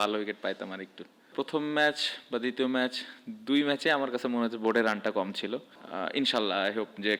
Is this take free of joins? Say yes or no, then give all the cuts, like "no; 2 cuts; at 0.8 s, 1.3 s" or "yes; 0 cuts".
no; 2 cuts; at 1.3 s, 5.8 s